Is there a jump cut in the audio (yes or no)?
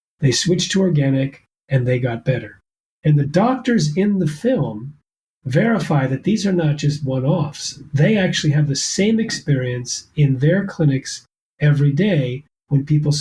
no